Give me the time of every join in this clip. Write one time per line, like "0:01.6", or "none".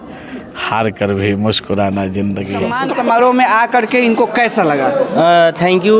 0:02.7